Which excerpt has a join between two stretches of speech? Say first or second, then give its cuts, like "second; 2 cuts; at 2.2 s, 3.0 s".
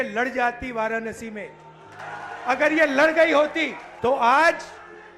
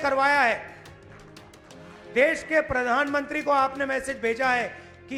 first; 2 cuts; at 2.0 s, 3.8 s